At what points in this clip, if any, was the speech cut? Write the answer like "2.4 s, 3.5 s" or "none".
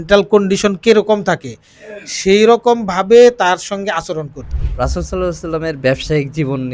4.6 s